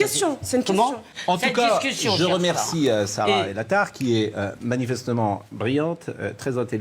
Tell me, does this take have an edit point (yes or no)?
yes